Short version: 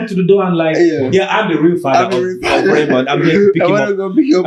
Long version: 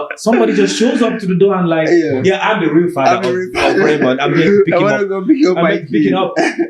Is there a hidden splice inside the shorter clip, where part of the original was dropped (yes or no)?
no